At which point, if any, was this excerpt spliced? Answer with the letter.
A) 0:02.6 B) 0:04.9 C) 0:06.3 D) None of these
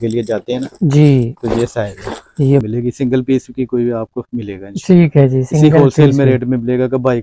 A